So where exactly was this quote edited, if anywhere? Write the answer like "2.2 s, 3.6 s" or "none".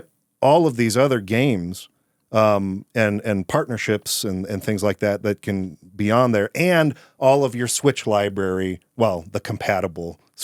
none